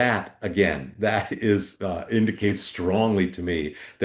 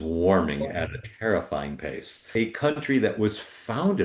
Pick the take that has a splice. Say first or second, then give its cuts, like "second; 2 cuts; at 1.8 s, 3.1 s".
second; 1 cut; at 2.3 s